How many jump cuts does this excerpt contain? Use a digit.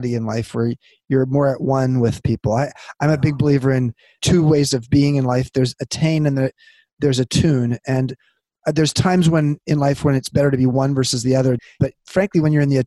2